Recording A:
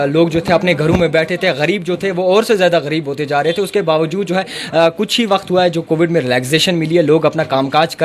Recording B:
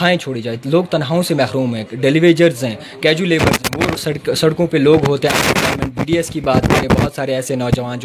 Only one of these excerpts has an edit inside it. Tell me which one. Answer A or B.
B